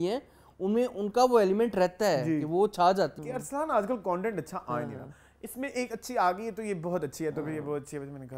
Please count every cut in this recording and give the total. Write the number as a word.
one